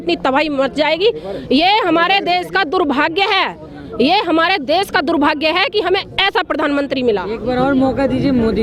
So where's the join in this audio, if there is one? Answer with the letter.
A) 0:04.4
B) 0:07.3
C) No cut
C